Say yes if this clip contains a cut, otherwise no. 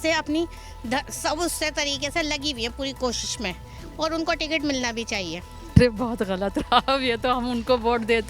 yes